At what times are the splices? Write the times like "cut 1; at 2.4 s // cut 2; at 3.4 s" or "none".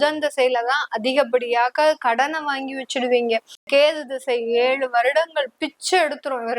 cut 1; at 3.7 s